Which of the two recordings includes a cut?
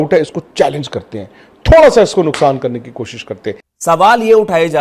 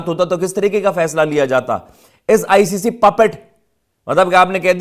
first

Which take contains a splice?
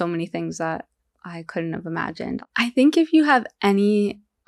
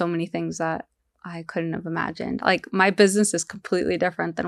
first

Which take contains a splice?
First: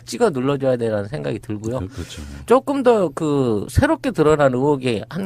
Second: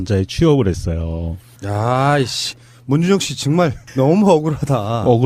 first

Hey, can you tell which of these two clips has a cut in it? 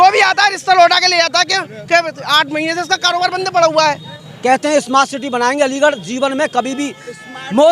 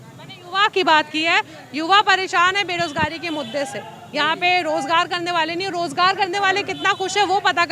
first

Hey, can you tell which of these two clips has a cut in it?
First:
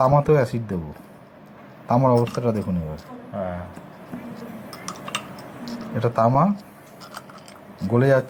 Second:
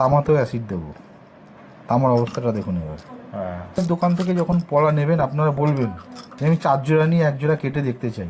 second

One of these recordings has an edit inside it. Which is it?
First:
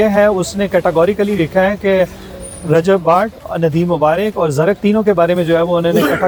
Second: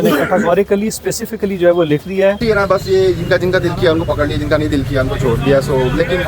second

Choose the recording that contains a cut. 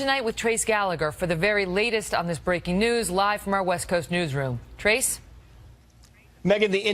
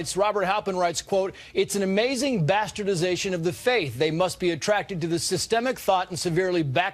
first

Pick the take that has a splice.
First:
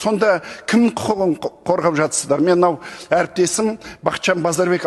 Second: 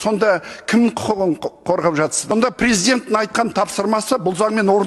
second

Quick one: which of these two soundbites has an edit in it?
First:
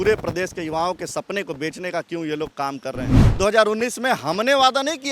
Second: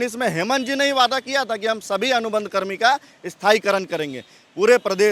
first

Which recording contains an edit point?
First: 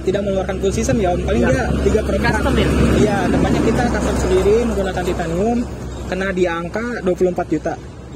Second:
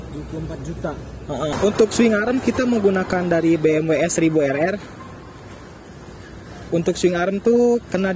second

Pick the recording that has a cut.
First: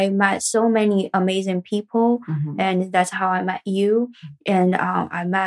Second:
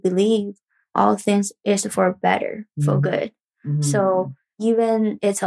second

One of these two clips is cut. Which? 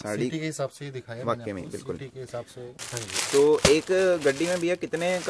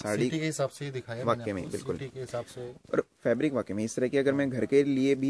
first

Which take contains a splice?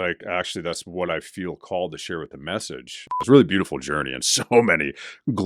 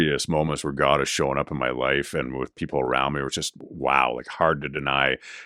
first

